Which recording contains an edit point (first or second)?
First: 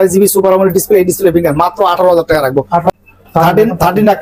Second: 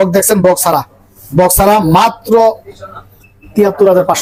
first